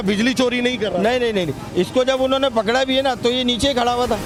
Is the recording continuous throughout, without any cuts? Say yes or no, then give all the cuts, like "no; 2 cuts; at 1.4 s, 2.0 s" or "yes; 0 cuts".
yes; 0 cuts